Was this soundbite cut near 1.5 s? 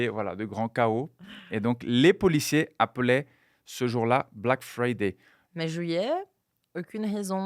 no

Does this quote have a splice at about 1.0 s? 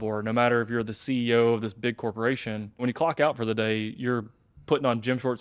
no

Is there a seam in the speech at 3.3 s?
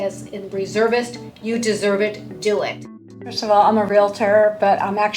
yes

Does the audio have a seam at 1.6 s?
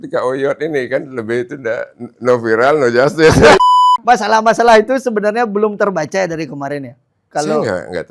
no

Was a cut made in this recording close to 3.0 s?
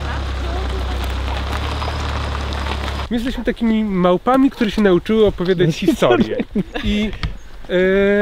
yes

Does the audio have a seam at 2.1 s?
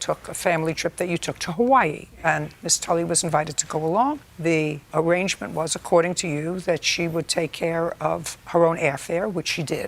no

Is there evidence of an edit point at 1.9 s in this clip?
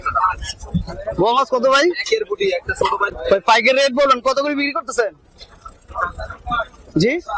no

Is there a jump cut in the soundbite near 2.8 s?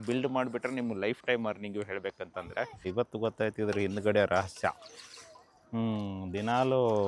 yes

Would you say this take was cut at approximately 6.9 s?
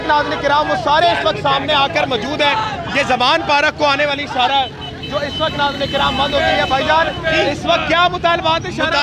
no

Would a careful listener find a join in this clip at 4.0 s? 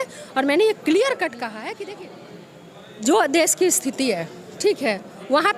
no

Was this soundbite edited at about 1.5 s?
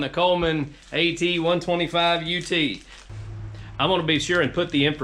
no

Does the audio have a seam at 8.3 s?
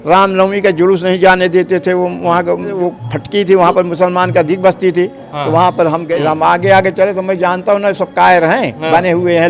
no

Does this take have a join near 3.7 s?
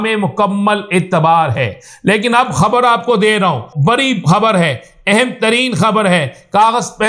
yes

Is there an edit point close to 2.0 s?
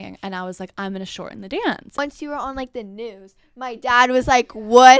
yes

